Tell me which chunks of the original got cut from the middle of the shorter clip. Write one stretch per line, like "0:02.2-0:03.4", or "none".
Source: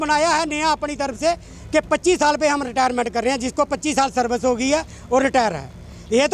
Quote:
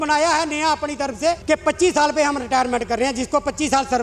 0:01.4-0:01.7